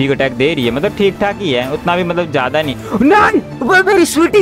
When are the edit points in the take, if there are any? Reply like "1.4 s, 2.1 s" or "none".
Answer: none